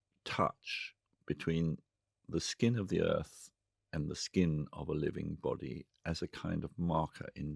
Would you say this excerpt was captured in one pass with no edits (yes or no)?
yes